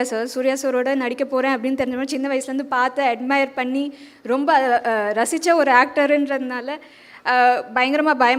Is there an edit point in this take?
no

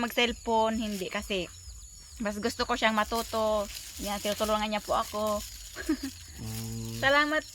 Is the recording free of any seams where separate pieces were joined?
yes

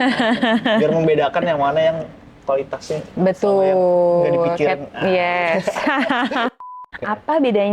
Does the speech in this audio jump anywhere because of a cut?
yes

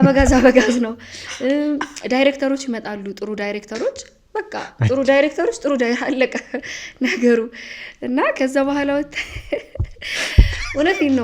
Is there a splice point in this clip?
no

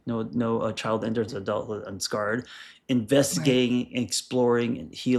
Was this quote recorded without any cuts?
yes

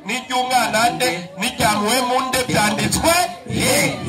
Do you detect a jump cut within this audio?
no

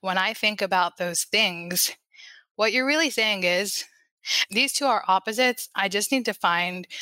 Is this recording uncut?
yes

